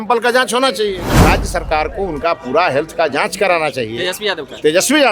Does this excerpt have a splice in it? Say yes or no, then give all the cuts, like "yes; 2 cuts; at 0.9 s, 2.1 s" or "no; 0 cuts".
yes; 1 cut; at 1.1 s